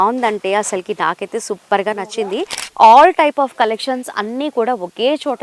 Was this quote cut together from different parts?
yes; 1 cut; at 2.6 s

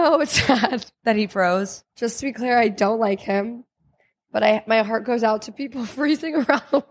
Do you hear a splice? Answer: yes; 2 cuts; at 0.9 s, 1.8 s

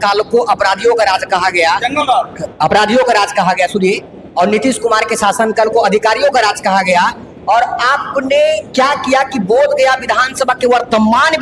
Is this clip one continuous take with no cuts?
yes; 0 cuts

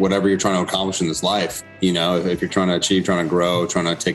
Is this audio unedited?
no; 1 cut; at 1.7 s

